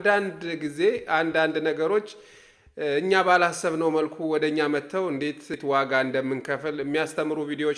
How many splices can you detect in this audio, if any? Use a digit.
1